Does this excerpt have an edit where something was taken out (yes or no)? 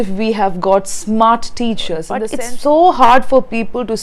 yes